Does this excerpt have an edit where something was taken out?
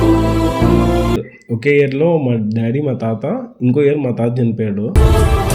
yes; 1 cut; at 1.3 s

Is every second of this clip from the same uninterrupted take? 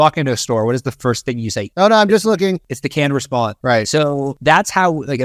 no; 3 cuts; at 1.6 s, 3.1 s, 4.3 s

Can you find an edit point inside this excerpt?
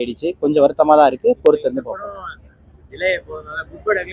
no; 0 cuts

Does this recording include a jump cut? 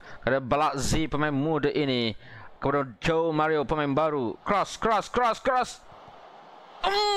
no; 0 cuts

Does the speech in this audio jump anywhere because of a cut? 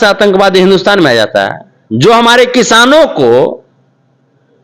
no; 0 cuts

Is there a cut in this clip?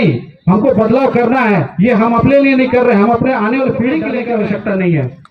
yes; 1 cut; at 4.2 s

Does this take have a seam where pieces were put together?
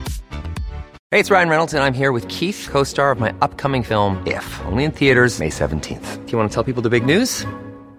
yes; 1 cut; at 0.9 s

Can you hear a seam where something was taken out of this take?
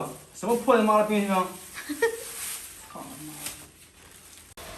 no; 0 cuts

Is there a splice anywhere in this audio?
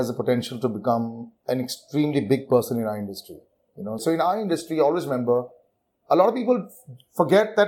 yes; 1 cut; at 4.0 s

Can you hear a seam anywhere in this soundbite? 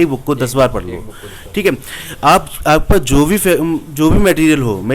no; 0 cuts

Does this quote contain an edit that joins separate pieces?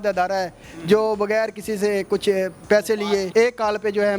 yes; 1 cut; at 3.3 s

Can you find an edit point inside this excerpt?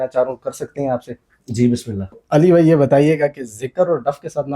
yes; 1 cut; at 2.2 s

